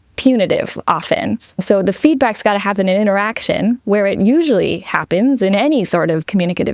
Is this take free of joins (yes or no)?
yes